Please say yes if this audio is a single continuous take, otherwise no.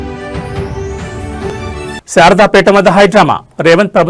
no